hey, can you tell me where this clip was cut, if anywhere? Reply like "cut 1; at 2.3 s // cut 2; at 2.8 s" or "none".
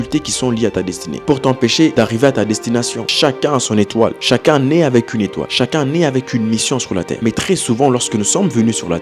cut 1; at 1.9 s // cut 2; at 3.0 s // cut 3; at 5.4 s // cut 4; at 7.1 s